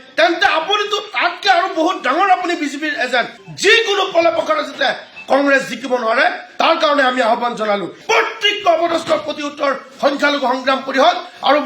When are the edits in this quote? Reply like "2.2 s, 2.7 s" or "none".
3.4 s, 7.9 s